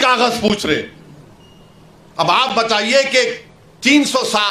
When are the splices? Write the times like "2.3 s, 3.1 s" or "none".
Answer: none